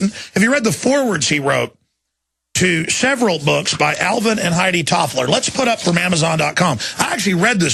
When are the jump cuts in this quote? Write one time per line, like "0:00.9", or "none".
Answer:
0:01.5